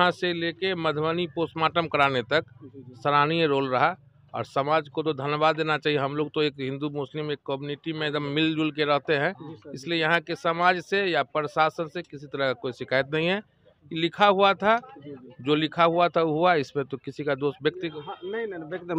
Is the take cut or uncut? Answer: uncut